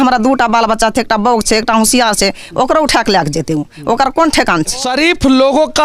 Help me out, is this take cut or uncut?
cut